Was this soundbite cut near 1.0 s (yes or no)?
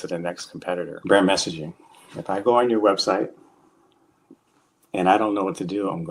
yes